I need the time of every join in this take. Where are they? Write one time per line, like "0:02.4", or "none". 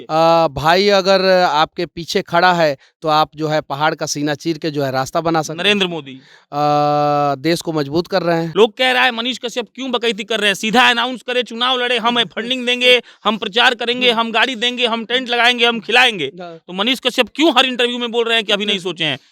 0:08.5